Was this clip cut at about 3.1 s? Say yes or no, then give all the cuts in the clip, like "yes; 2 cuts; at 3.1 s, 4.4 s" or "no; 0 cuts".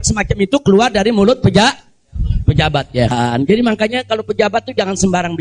yes; 1 cut; at 3.1 s